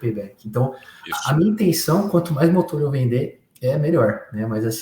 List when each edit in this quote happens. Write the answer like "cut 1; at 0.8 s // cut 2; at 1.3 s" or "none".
none